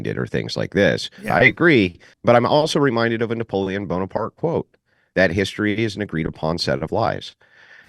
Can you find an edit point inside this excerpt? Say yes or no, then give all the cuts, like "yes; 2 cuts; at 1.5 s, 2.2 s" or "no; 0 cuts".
yes; 2 cuts; at 1.3 s, 2.1 s